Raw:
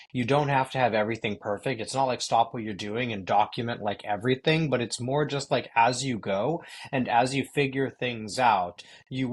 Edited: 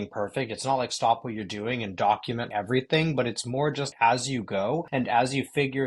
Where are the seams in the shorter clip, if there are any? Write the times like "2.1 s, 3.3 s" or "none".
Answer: 2.5 s, 3.9 s, 4.9 s